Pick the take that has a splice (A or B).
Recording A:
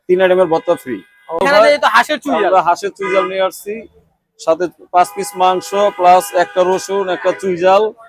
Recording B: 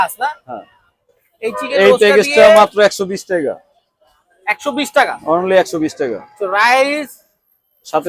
A